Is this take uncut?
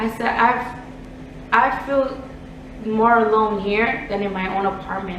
yes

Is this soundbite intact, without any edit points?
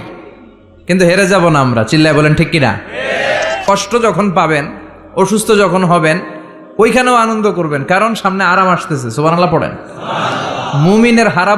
no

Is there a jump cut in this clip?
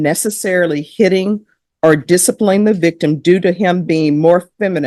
no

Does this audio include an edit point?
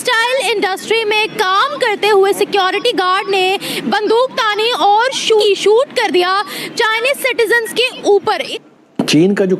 yes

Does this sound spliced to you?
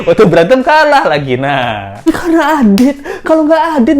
yes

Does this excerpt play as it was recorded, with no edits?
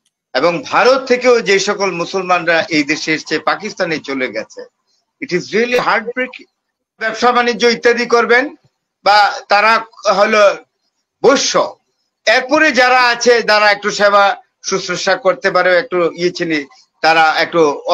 no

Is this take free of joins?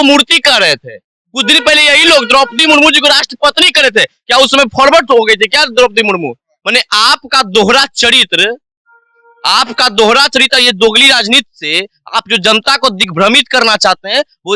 yes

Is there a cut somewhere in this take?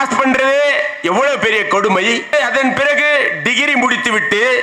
yes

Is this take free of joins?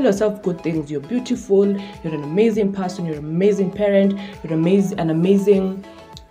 yes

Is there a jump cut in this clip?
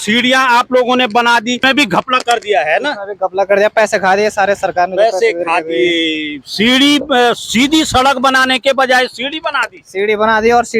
yes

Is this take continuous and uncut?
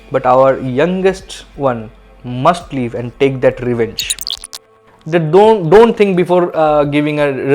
no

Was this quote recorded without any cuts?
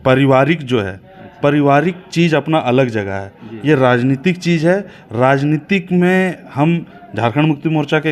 yes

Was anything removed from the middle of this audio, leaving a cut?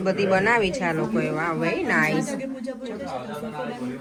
no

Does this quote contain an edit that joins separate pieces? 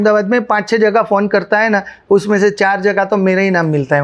no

